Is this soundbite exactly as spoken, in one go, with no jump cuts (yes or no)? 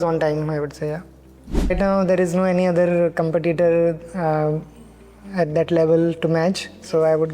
no